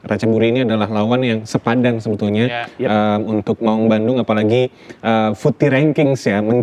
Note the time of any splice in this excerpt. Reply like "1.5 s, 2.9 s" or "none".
none